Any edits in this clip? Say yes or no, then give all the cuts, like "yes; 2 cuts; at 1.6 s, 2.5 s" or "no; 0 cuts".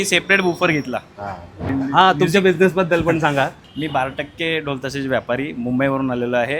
yes; 2 cuts; at 1.7 s, 3.7 s